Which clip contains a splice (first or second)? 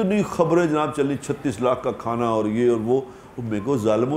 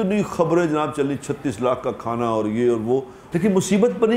second